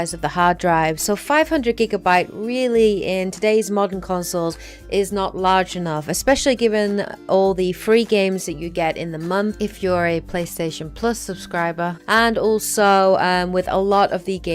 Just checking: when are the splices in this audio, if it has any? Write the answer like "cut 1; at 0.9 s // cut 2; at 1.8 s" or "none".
cut 1; at 2.7 s